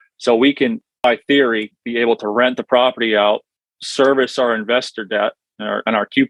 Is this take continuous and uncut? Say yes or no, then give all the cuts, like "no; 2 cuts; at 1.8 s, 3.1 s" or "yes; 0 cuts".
yes; 0 cuts